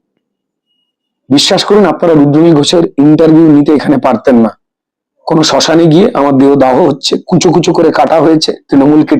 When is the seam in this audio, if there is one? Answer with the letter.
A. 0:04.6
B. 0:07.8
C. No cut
C